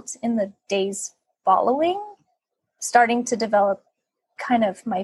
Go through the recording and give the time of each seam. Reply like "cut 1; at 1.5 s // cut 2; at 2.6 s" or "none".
none